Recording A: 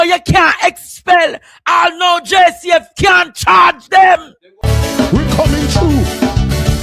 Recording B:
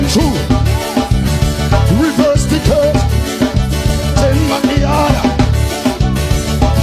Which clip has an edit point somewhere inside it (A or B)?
A